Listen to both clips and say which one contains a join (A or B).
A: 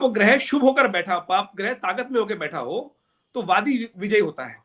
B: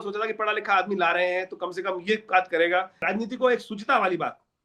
B